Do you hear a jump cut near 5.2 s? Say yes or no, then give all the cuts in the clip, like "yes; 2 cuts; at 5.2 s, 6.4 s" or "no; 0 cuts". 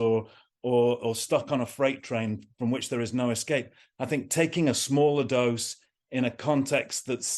no; 0 cuts